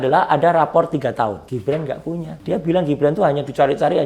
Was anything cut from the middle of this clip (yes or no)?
yes